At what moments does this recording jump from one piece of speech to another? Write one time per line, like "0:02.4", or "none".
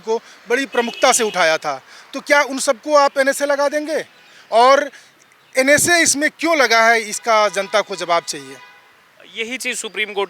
none